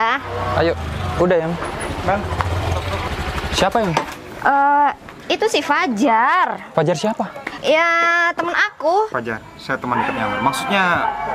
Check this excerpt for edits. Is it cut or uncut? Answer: cut